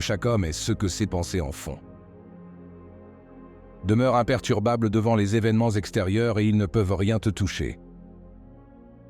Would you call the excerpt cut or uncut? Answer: uncut